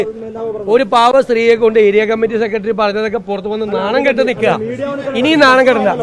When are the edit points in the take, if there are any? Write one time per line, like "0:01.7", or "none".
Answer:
none